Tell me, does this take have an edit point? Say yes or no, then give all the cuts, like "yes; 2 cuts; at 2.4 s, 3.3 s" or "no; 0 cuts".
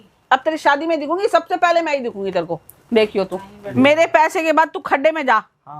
yes; 1 cut; at 3.7 s